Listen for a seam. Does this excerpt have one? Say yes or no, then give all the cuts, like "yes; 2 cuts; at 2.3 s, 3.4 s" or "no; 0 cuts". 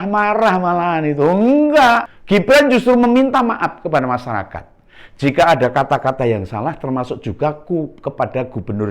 yes; 1 cut; at 2.1 s